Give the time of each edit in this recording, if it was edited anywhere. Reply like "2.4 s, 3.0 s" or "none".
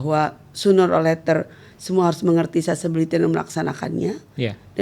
none